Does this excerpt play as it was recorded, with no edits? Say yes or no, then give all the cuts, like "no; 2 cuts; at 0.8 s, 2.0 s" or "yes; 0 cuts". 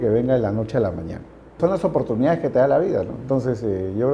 no; 1 cut; at 1.6 s